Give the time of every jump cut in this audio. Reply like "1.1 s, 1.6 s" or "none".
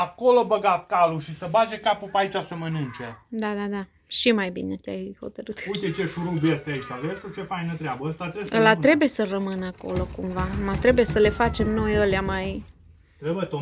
none

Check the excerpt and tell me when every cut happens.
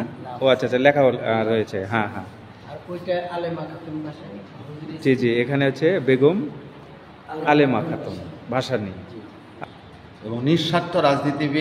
9.4 s

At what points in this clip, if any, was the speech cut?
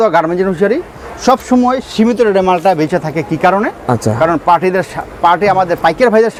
none

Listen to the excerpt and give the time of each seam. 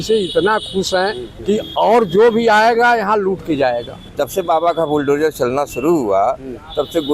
1.3 s, 4.0 s

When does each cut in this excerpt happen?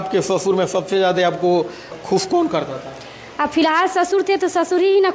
2.0 s

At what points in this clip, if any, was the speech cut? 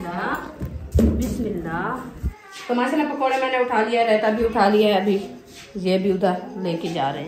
2.2 s

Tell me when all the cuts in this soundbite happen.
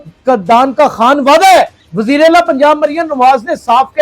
1.9 s

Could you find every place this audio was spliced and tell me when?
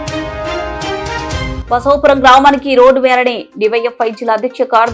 1.4 s

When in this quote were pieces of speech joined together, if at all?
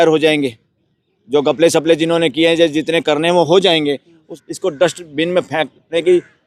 4.3 s

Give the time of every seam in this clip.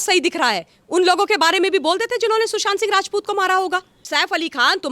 4.0 s

